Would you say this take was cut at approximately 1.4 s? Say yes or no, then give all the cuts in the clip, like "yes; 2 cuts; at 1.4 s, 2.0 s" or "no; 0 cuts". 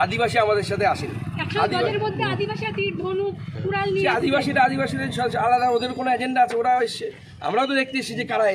no; 0 cuts